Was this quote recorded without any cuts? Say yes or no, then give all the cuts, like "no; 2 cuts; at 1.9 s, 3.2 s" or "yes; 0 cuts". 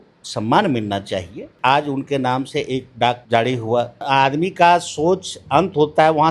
no; 3 cuts; at 1.5 s, 3.2 s, 4.0 s